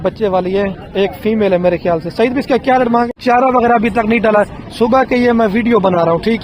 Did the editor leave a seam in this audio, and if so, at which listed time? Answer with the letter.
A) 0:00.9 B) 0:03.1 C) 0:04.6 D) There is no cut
B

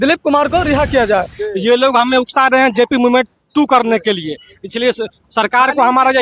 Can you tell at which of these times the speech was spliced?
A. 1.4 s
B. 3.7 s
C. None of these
A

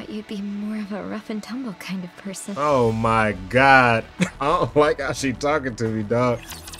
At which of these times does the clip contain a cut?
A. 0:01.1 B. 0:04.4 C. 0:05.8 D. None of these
B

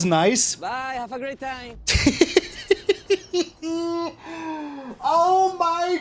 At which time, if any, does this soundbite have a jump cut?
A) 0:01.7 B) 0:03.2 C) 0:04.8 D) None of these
D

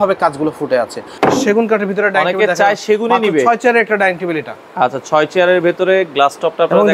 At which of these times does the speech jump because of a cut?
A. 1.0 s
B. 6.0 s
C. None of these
A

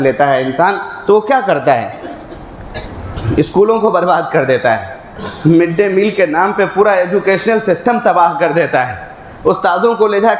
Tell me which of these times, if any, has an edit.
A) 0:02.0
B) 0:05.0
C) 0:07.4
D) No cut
D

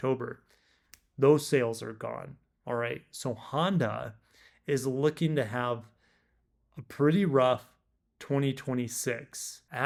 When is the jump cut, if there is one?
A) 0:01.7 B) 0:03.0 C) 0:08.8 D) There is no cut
D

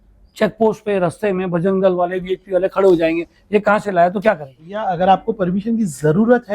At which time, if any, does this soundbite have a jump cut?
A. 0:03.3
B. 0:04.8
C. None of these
B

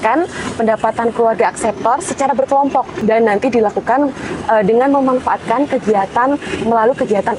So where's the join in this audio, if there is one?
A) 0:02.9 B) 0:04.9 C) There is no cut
A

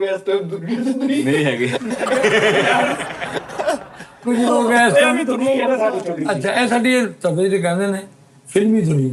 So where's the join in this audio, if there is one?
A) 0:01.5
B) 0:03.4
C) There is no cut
C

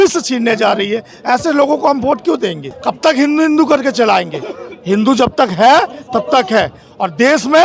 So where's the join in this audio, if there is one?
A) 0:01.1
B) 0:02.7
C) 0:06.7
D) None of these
B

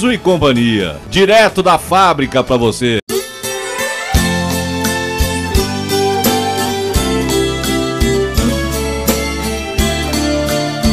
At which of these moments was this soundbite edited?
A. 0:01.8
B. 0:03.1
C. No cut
B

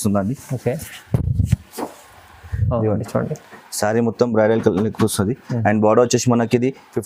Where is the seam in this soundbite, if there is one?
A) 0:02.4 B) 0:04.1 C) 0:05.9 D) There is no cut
D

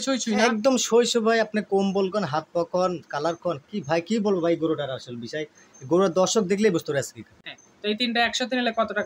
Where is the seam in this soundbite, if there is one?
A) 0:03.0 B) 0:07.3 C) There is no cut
B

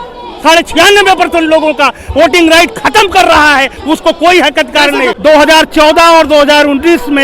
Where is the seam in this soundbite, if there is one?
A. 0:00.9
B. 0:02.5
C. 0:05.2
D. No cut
C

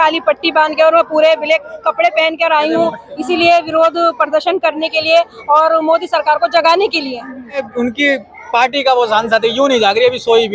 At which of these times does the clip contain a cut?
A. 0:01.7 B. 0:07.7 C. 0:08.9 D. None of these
B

